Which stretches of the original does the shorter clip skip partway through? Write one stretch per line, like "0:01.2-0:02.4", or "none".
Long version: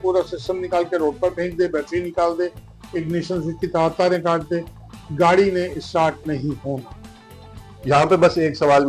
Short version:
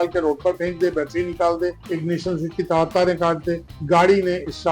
0:02.6-0:02.8
0:04.7-0:05.0